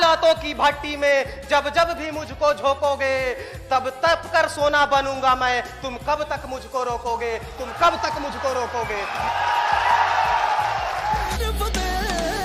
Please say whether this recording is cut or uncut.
cut